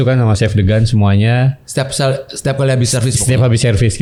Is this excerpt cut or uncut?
uncut